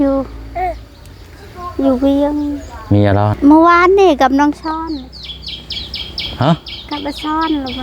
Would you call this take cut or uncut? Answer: cut